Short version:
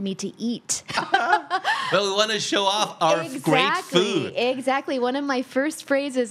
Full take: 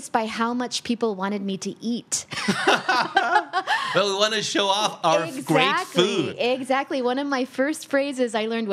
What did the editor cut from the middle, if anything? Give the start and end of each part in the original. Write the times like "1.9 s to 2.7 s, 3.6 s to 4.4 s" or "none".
2.4 s to 3.0 s